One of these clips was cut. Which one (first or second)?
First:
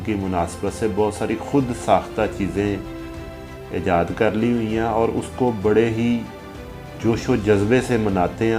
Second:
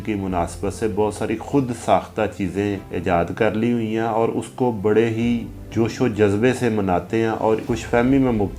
second